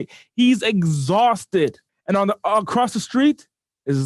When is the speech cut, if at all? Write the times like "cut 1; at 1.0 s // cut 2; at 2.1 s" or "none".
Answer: cut 1; at 1.9 s

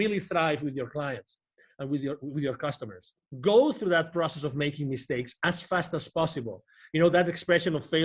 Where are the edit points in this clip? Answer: cut 1; at 3.2 s

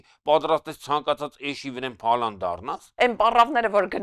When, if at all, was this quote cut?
cut 1; at 2.8 s

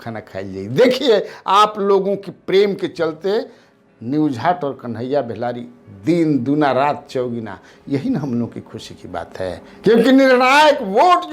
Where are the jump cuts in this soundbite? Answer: cut 1; at 9.7 s

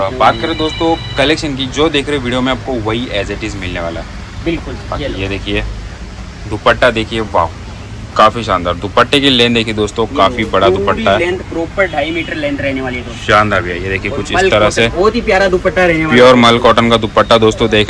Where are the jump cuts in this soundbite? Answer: none

